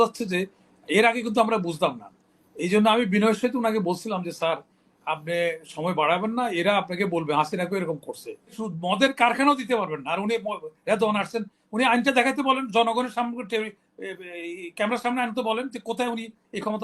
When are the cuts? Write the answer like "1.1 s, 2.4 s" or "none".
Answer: 8.7 s